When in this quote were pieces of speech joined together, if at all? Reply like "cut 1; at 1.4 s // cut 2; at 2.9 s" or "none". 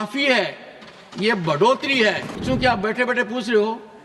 cut 1; at 2.4 s